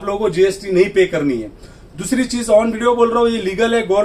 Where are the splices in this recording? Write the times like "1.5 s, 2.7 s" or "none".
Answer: none